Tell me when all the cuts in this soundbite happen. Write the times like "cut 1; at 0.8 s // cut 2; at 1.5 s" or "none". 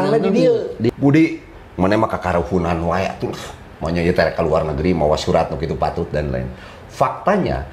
cut 1; at 0.9 s